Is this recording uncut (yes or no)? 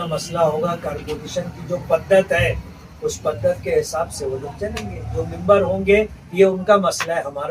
yes